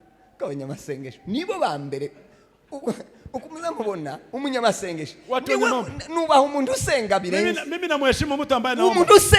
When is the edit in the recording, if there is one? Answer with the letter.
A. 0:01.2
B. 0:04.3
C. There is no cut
C